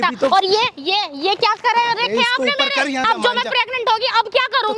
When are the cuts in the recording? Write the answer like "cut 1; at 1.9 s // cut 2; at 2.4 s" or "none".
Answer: cut 1; at 3.1 s